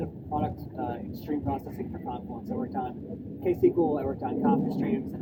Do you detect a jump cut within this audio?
no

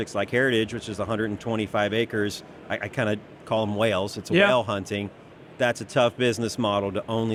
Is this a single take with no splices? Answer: yes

